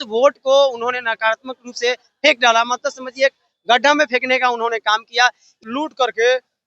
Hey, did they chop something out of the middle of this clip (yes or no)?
yes